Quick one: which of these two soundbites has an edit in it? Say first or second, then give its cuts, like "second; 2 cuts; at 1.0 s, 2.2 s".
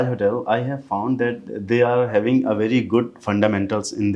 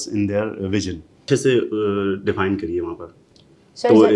second; 1 cut; at 1.2 s